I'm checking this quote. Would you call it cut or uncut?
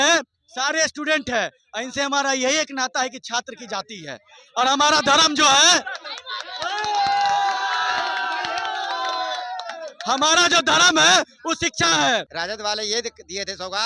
cut